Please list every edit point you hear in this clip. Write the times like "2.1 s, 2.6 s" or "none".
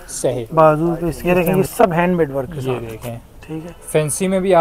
1.1 s